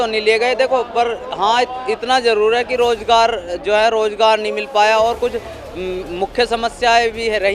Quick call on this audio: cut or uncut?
uncut